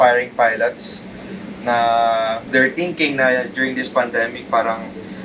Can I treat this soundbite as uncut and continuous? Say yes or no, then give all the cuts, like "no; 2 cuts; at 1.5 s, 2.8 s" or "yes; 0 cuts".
yes; 0 cuts